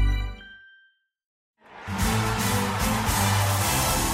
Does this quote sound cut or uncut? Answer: cut